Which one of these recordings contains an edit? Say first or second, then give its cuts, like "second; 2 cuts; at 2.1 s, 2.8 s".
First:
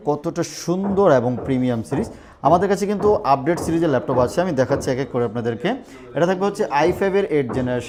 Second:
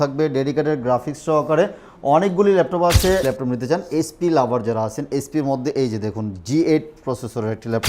second; 1 cut; at 3.2 s